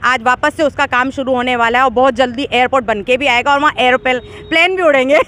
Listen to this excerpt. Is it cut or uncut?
uncut